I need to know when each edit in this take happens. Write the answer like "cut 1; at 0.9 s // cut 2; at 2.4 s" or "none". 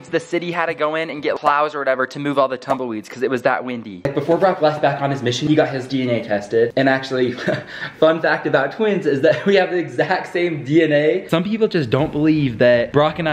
cut 1; at 4.1 s // cut 2; at 5.4 s // cut 3; at 11.3 s